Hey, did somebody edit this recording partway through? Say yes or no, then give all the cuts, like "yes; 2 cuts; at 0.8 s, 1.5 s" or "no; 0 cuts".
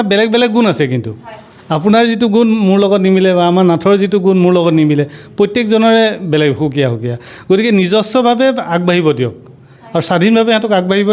no; 0 cuts